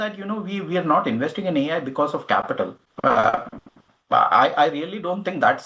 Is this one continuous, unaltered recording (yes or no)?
yes